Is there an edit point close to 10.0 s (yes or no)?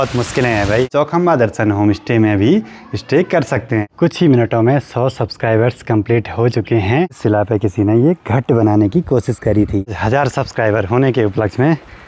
yes